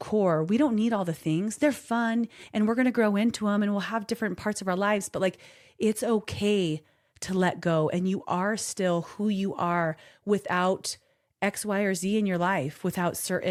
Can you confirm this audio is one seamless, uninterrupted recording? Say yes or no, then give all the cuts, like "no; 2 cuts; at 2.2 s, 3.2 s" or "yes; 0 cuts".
yes; 0 cuts